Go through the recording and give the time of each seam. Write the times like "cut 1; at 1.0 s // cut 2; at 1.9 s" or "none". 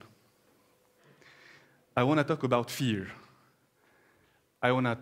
cut 1; at 1.1 s